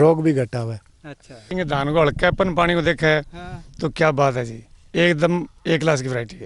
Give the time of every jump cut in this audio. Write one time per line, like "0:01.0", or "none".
0:01.5